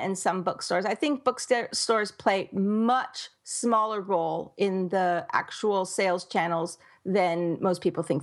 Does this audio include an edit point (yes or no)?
no